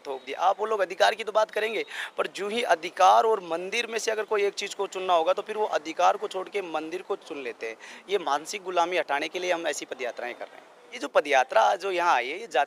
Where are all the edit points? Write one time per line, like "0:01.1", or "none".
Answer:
0:11.0